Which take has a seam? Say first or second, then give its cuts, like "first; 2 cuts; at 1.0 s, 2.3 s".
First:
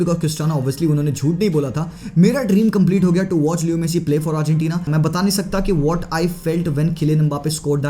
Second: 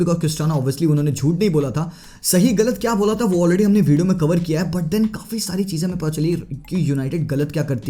first; 2 cuts; at 2.0 s, 4.9 s